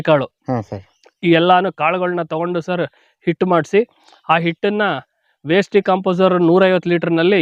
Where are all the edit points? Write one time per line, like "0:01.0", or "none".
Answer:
none